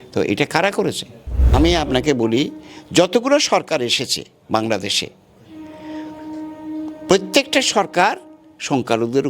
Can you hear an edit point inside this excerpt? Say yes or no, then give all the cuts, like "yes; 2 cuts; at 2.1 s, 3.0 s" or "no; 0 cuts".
yes; 1 cut; at 1.5 s